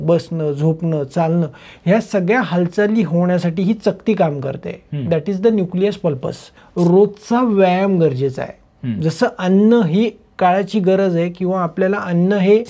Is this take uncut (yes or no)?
no